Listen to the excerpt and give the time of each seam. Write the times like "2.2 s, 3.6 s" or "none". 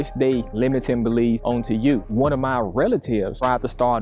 2.0 s